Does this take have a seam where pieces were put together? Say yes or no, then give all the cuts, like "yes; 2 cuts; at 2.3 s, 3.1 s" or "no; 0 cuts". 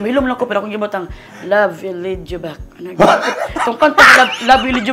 no; 0 cuts